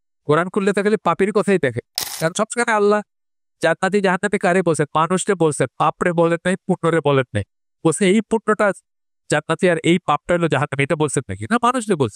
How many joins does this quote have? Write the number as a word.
one